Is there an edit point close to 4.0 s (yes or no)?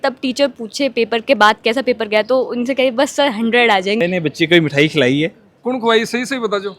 yes